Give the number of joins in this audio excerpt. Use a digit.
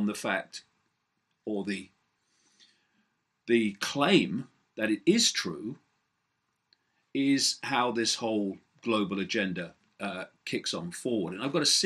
1